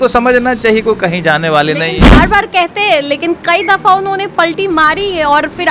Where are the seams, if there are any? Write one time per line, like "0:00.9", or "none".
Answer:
none

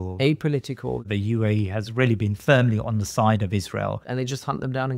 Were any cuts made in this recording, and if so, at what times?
0:01.1
0:04.0

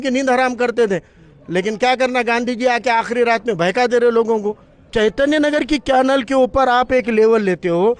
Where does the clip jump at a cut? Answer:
0:04.9

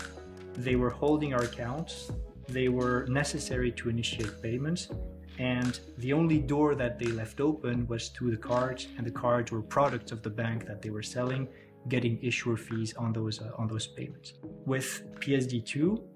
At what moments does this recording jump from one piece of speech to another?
0:14.5

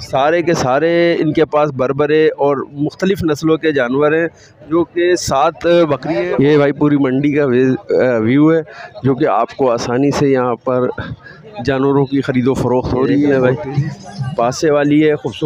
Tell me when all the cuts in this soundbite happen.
0:06.1
0:13.3

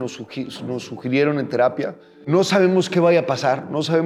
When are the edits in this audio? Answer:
0:02.2

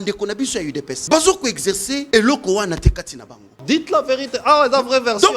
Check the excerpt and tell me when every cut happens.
0:01.0
0:02.0
0:03.6

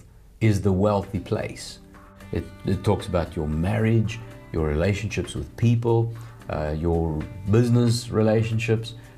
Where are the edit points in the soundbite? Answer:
0:02.2

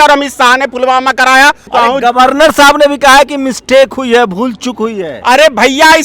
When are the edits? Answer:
0:01.6

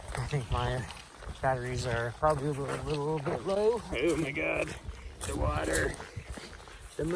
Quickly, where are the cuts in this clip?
0:03.9

